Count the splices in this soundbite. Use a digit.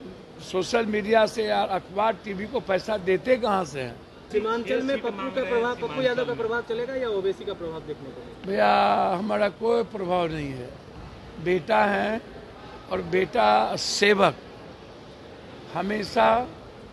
1